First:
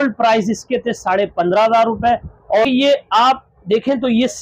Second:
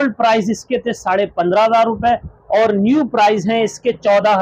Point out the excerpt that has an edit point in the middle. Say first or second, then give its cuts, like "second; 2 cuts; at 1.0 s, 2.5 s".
first; 1 cut; at 2.7 s